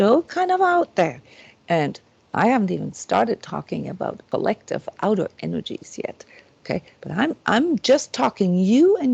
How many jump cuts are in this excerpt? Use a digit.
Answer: 1